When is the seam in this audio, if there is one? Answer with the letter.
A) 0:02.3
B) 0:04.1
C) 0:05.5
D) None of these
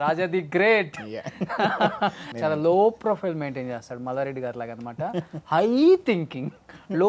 A